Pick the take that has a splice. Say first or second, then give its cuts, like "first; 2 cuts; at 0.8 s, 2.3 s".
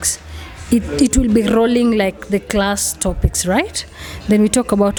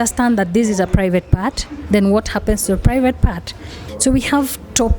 second; 1 cut; at 3.8 s